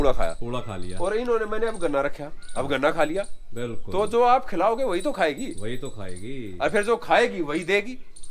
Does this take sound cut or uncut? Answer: uncut